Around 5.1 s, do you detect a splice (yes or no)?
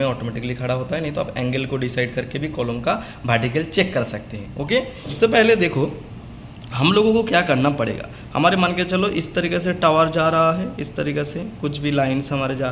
yes